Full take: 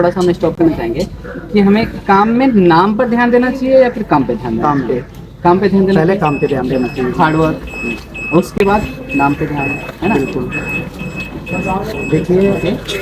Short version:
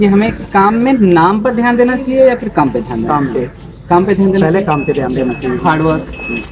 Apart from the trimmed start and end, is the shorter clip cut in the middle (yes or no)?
no